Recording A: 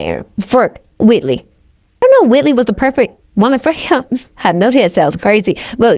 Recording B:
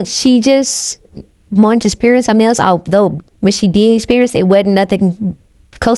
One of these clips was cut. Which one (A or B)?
A